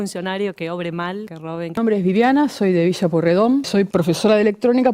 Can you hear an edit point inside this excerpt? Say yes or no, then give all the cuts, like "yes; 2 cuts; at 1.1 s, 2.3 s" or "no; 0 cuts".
yes; 2 cuts; at 1.8 s, 3.7 s